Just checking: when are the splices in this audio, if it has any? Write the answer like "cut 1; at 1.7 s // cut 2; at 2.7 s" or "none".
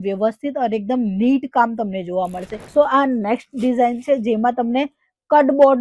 cut 1; at 2.5 s